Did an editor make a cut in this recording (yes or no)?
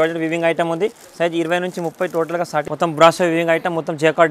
yes